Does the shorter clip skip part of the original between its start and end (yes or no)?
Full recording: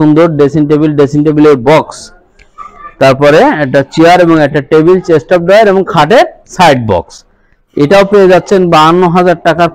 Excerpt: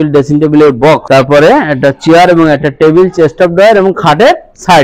yes